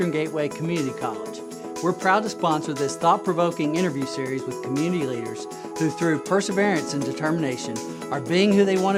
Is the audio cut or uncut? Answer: uncut